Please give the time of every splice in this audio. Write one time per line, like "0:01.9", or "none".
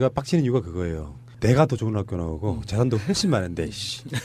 none